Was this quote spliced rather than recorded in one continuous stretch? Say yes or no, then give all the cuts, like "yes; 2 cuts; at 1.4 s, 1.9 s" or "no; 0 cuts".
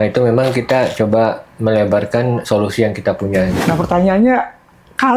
yes; 1 cut; at 3.6 s